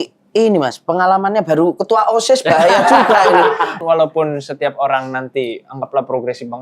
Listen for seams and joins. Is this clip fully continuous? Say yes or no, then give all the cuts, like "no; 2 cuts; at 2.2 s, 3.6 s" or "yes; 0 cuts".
no; 1 cut; at 3.8 s